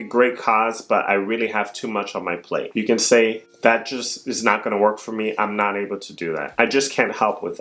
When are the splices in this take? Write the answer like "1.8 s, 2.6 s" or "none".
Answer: 2.7 s, 6.5 s

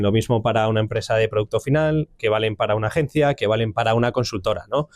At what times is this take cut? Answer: none

